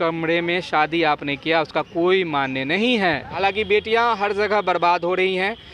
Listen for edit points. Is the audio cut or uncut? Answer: cut